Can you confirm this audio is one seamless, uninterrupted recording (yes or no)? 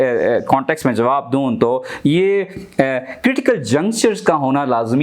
no